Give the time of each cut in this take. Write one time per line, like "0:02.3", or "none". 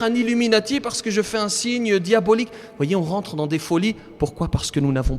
none